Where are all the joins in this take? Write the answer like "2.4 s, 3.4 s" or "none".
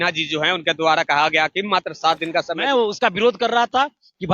2.6 s